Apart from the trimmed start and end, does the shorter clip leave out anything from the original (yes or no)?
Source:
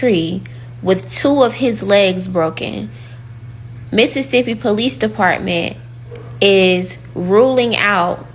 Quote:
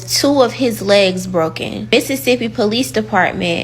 yes